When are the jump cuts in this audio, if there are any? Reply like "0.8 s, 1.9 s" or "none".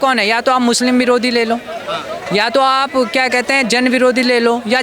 none